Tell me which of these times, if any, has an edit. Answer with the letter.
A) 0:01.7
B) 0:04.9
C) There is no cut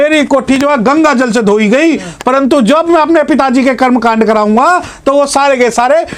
C